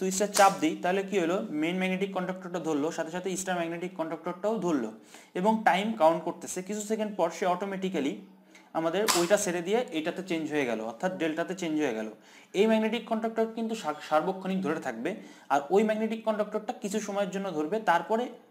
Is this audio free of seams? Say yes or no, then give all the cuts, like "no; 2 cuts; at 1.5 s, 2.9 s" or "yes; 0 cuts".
yes; 0 cuts